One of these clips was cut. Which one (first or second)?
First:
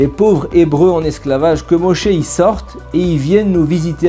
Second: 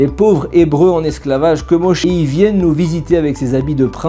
second